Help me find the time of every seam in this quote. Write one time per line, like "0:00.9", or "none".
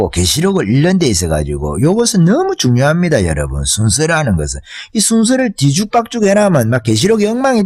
none